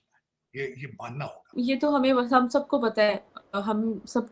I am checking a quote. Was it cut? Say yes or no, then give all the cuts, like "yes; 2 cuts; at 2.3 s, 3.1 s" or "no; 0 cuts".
yes; 1 cut; at 1.5 s